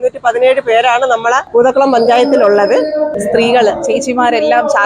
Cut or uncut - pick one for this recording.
cut